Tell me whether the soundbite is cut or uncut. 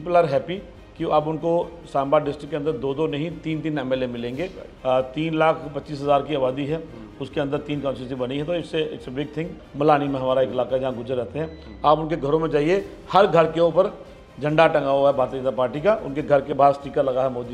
cut